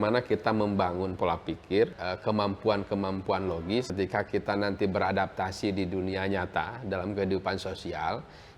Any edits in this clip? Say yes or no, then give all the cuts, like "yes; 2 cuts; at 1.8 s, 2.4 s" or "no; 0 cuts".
yes; 2 cuts; at 2.0 s, 3.9 s